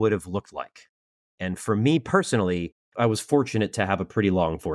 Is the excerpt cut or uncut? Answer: cut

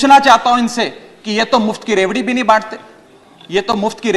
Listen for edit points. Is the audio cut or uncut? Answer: uncut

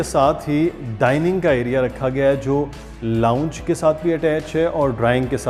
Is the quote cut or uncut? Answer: uncut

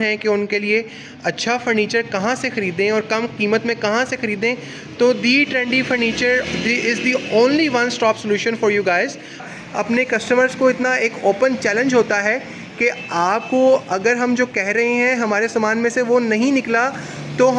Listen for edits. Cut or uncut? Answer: cut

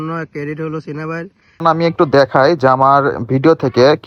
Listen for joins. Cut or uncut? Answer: cut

